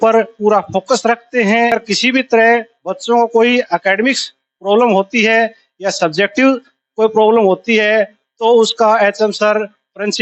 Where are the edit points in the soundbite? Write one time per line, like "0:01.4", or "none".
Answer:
0:01.7